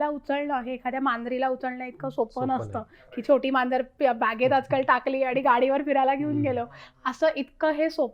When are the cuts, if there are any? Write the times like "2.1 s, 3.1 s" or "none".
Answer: none